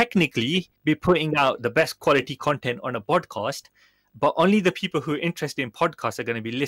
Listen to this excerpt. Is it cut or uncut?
uncut